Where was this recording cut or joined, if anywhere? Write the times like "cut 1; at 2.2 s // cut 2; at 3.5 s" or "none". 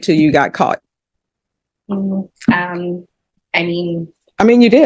none